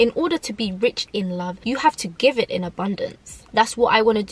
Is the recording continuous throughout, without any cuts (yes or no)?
no